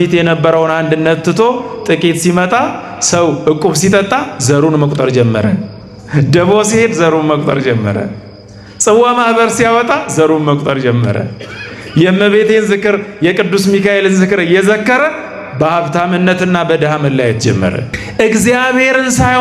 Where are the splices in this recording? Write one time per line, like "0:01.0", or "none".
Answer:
0:17.9